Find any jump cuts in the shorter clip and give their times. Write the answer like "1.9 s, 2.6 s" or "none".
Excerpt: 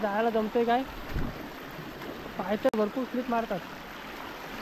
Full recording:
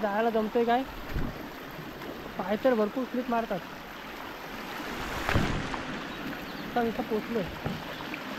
none